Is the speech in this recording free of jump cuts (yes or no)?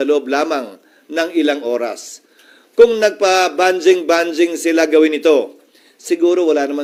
yes